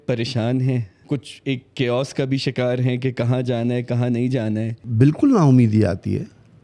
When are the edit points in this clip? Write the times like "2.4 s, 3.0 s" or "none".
0.9 s, 4.8 s